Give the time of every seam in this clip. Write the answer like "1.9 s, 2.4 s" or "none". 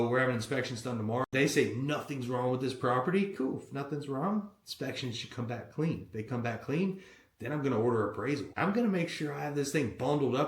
1.3 s